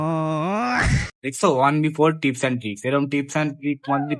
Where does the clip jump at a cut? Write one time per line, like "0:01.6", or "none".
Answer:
0:01.1